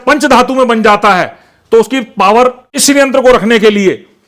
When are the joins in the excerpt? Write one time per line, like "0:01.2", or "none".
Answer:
0:02.7

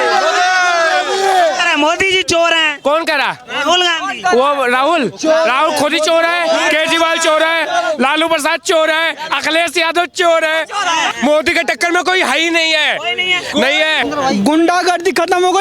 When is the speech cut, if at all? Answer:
0:11.2
0:14.0

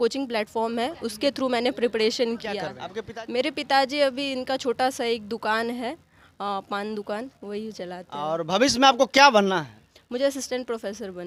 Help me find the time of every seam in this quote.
none

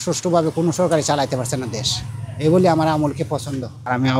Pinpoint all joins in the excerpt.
none

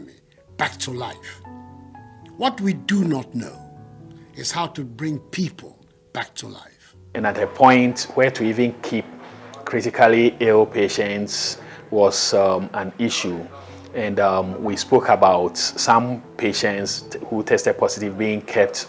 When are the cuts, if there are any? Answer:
0:07.1

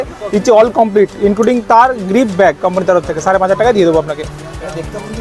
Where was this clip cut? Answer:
none

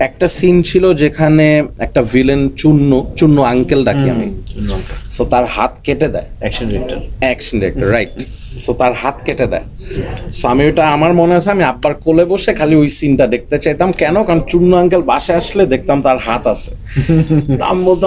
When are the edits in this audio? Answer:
none

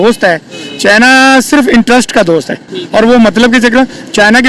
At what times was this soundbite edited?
none

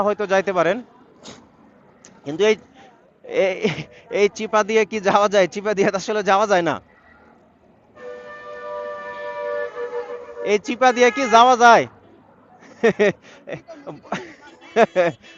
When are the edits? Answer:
none

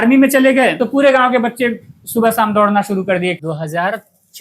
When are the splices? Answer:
0:03.4

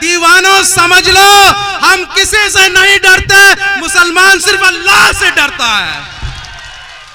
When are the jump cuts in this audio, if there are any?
none

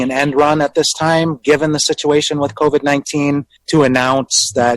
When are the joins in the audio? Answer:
0:03.5

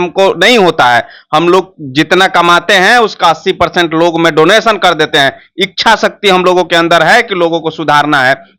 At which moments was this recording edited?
none

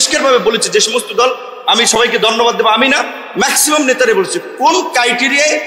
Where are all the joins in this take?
none

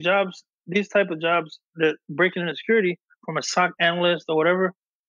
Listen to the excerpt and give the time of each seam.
none

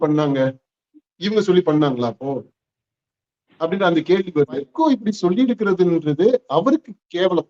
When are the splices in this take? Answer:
0:04.7

